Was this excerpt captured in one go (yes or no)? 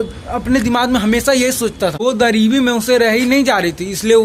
no